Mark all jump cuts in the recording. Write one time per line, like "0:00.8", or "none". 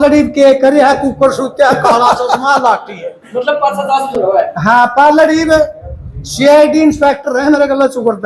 none